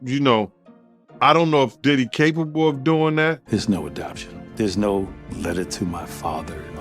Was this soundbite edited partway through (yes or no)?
yes